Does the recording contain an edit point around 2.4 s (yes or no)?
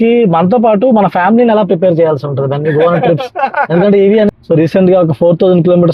no